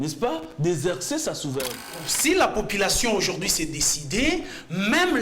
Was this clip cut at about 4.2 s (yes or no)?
no